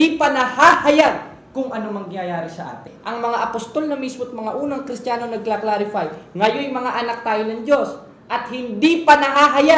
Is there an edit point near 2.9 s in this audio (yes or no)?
yes